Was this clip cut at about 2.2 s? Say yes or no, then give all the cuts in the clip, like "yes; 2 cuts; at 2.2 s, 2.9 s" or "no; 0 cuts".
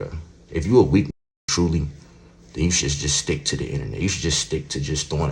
no; 0 cuts